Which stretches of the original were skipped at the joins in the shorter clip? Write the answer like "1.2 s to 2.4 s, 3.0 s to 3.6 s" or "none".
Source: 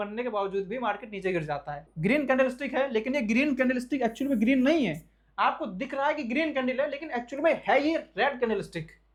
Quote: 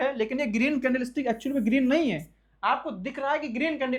none